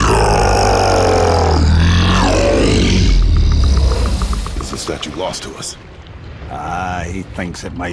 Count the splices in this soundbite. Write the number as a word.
zero